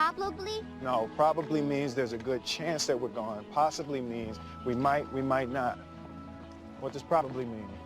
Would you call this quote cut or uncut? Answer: cut